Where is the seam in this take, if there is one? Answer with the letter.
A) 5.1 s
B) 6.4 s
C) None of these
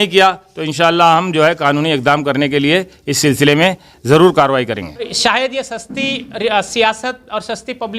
A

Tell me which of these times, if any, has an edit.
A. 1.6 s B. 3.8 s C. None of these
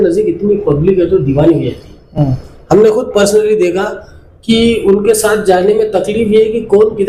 C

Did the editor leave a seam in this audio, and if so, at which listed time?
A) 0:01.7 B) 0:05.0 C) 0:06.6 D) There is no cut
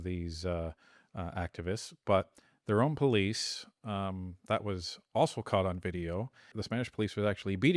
C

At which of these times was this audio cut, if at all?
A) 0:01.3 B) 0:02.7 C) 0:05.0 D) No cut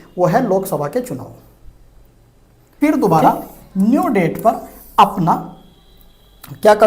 B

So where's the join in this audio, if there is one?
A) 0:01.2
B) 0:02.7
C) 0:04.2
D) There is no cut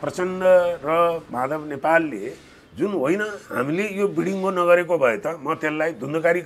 D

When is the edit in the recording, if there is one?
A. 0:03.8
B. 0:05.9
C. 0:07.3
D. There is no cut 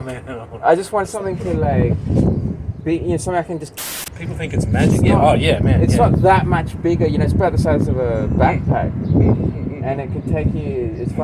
A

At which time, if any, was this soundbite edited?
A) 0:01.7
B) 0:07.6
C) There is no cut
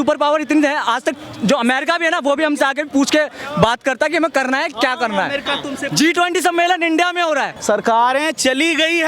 B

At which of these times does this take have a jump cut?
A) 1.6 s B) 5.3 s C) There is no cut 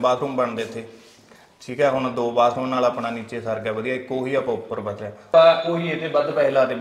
C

